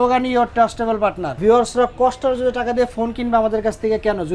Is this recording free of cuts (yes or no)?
no